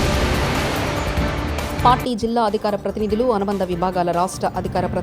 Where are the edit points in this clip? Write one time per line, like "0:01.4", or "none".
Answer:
0:01.8